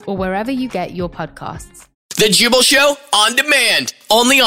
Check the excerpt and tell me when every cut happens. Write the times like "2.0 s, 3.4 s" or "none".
2.0 s

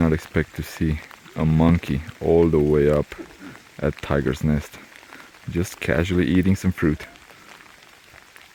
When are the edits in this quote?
none

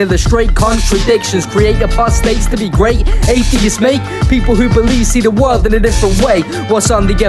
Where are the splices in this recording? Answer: none

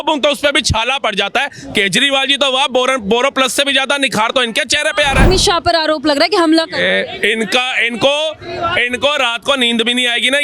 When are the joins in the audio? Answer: 5.2 s

